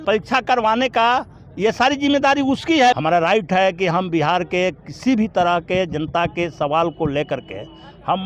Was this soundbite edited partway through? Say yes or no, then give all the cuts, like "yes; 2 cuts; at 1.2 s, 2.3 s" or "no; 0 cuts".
yes; 1 cut; at 2.9 s